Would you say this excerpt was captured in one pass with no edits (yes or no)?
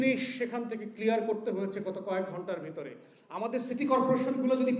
yes